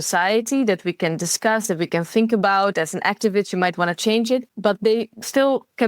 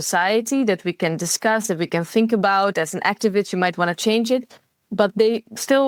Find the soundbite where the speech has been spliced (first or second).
first